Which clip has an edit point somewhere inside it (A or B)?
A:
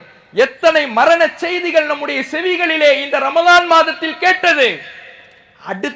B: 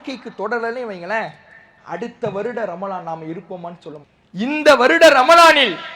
B